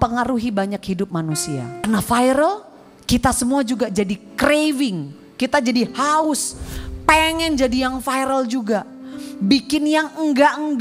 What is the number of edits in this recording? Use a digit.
1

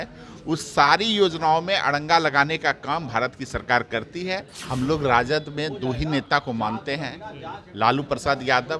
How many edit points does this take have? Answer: 1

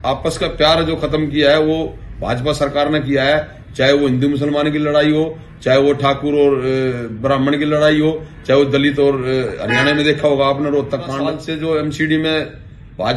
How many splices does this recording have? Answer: 1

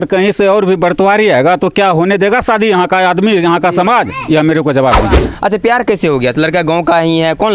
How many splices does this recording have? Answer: 1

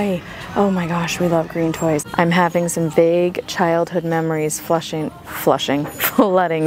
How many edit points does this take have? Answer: 1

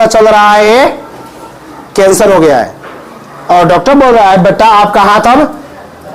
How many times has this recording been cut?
0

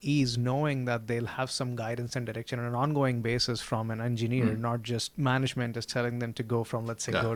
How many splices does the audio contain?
0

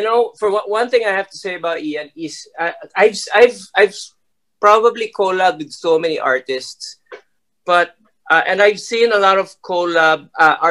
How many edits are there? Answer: 0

